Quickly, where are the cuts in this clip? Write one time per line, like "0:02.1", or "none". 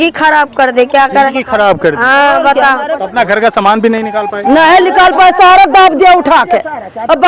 0:02.9